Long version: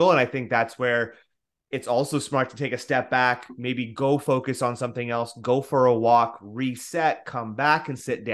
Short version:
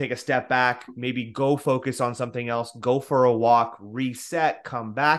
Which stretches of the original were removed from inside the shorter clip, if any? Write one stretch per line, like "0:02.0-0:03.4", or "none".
none